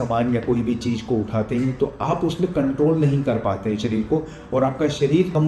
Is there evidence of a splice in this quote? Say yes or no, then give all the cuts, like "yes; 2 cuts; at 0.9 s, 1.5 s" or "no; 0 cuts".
no; 0 cuts